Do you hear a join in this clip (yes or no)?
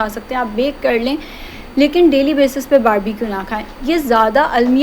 no